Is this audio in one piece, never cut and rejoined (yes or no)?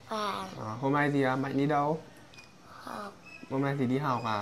yes